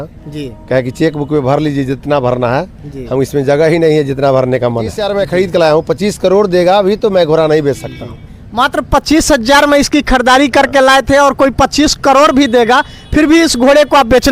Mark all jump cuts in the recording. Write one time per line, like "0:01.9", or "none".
0:05.0